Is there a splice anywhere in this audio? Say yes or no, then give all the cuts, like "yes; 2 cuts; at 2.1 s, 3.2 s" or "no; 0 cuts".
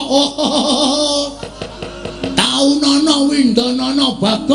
no; 0 cuts